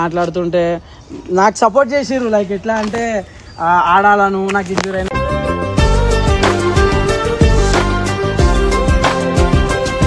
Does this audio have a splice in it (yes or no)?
no